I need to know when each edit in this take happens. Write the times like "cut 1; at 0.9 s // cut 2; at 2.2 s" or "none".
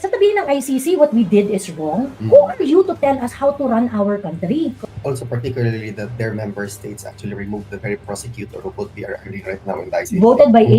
cut 1; at 4.8 s